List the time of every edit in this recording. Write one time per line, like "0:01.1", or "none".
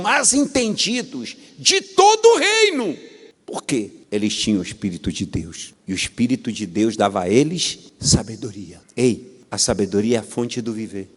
none